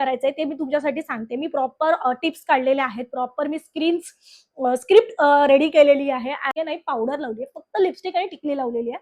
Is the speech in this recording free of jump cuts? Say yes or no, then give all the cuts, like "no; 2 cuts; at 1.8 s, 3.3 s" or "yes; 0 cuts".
no; 1 cut; at 6.5 s